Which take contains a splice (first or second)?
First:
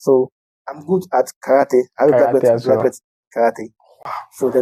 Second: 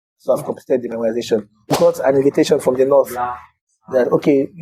second